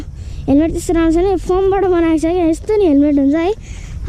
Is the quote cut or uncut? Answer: uncut